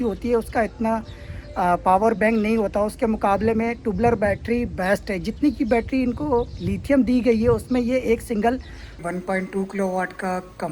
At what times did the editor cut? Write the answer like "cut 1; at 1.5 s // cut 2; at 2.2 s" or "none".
cut 1; at 9.0 s